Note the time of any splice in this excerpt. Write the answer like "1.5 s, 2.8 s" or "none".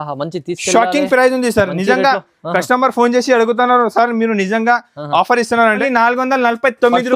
5.8 s